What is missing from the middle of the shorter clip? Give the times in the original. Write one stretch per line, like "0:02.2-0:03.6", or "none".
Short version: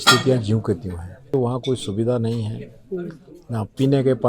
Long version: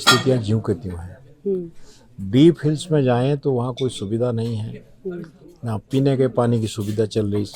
0:01.3-0:03.4